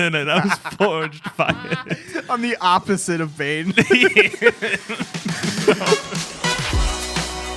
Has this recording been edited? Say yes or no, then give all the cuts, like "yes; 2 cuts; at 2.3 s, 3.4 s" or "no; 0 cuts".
yes; 1 cut; at 6.2 s